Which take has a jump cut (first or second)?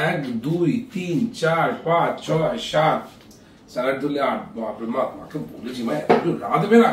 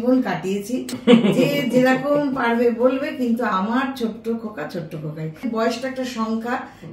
second